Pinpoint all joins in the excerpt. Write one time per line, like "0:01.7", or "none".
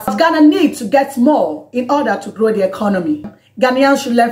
0:03.3